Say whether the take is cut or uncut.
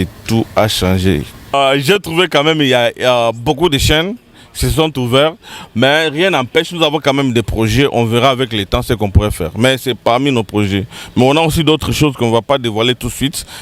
cut